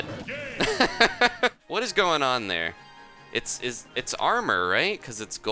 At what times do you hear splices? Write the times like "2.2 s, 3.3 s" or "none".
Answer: 1.6 s